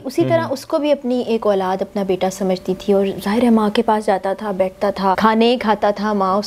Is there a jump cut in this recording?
yes; 1 cut; at 5.2 s

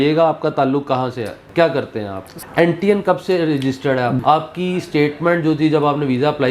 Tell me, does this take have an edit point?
yes; 3 cuts; at 1.4 s, 2.3 s, 4.2 s

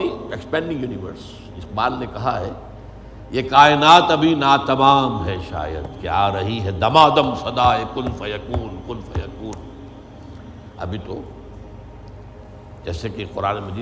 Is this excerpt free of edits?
yes; 0 cuts

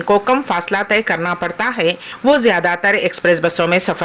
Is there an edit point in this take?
yes; 1 cut; at 2.1 s

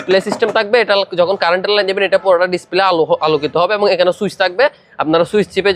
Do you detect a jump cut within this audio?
no; 0 cuts

